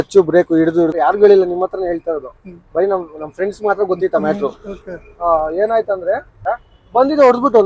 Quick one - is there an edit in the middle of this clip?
yes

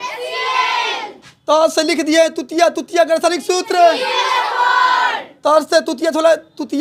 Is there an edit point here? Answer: no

